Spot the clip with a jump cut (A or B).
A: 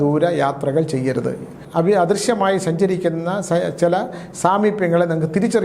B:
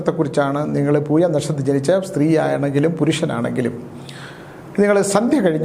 A